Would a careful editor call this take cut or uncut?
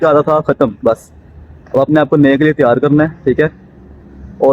uncut